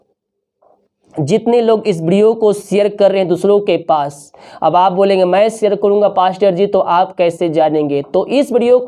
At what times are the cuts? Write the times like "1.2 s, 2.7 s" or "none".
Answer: none